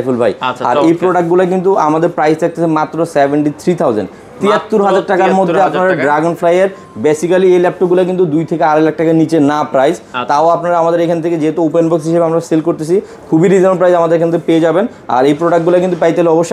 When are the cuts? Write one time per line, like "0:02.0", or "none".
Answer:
none